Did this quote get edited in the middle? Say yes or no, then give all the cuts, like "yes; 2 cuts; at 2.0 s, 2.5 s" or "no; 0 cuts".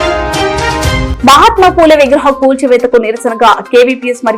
yes; 1 cut; at 1.1 s